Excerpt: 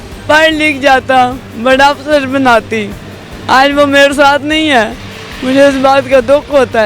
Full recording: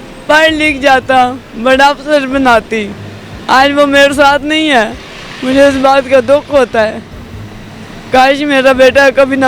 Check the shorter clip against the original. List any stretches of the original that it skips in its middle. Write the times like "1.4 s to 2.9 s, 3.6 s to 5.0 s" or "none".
none

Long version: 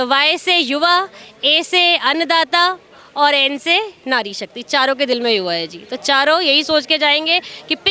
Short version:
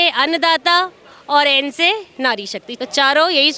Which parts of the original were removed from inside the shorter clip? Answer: 4.5 s to 5.8 s

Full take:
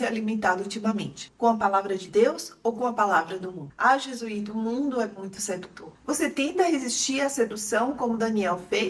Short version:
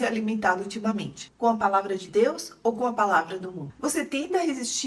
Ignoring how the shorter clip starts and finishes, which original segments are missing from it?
3.6 s to 5.8 s

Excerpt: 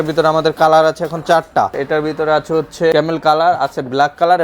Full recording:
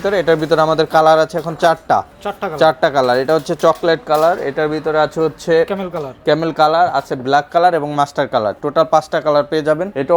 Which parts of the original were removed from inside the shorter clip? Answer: 2.1 s to 4.4 s, 5.6 s to 6.3 s

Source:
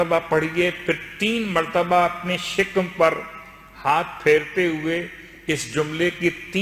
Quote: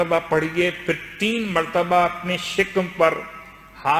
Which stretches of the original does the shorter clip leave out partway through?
none

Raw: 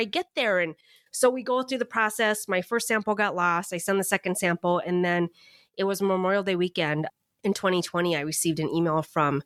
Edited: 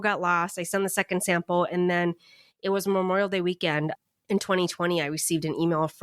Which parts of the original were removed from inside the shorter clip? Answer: none

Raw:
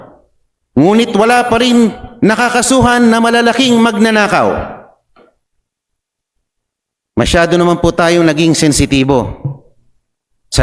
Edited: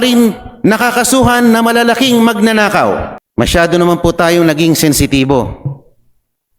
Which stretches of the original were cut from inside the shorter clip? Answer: 4.7 s to 7.0 s

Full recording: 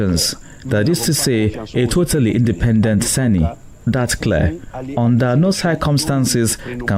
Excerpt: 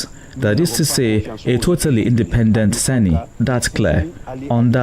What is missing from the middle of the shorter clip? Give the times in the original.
3.6 s to 3.8 s

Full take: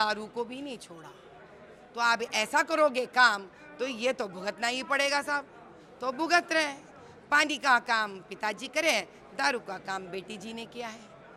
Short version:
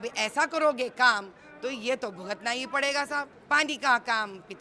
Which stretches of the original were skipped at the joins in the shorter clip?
5.5 s to 7.1 s

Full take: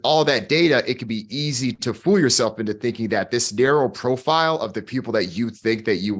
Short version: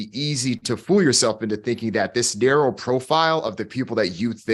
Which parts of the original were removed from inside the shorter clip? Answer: none

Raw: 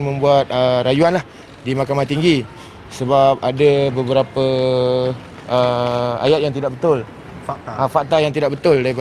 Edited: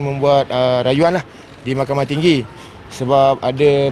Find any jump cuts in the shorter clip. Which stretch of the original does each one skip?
none

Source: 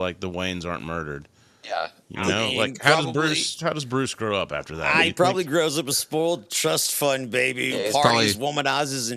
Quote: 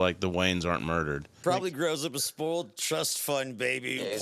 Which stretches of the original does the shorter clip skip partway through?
1.4 s to 5.1 s

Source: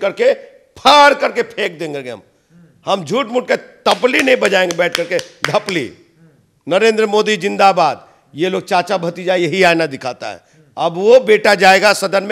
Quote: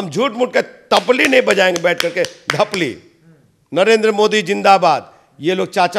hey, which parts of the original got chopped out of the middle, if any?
none

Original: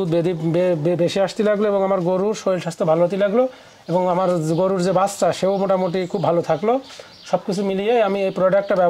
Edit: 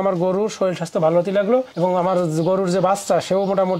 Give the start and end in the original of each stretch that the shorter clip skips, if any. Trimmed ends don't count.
3.6 s to 3.8 s

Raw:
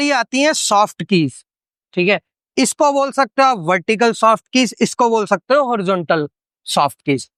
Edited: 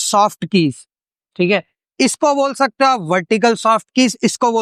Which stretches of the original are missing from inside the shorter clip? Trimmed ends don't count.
none

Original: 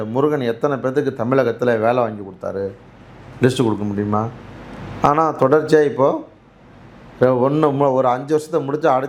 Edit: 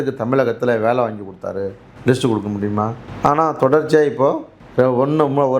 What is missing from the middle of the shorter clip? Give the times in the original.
2.8 s to 3.2 s, 4.4 s to 4.8 s, 6.3 s to 7.0 s

